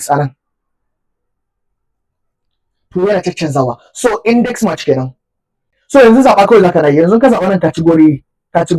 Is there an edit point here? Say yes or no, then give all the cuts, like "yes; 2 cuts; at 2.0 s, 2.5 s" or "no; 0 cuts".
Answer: yes; 1 cut; at 5.7 s